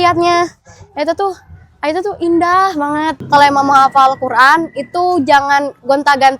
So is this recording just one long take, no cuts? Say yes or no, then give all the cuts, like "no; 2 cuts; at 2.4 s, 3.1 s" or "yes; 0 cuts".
no; 1 cut; at 3.2 s